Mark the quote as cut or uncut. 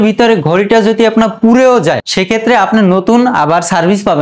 cut